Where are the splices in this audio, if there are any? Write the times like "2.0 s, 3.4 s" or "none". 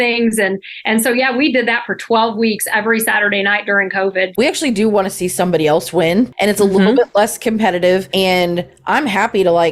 4.3 s